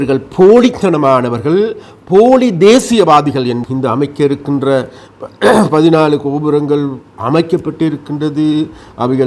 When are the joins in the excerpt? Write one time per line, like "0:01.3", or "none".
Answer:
0:03.6